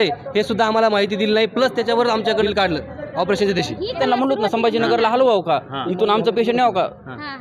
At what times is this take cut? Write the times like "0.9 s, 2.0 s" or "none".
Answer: 2.4 s, 4.0 s